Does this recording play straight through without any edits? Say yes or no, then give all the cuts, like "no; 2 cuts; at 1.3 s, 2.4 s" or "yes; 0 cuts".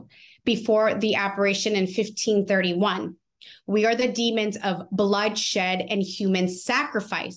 yes; 0 cuts